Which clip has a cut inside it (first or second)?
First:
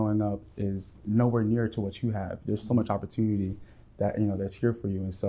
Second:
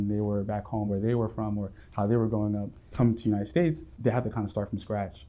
second